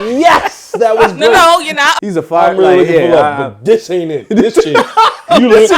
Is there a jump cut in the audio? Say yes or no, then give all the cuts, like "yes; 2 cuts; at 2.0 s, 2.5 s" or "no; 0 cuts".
yes; 1 cut; at 1.9 s